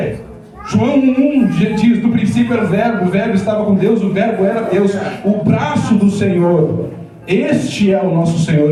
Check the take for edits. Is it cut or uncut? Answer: uncut